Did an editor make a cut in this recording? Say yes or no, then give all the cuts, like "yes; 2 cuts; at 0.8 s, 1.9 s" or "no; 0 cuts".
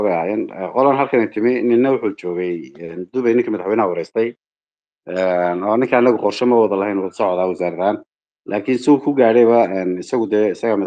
no; 0 cuts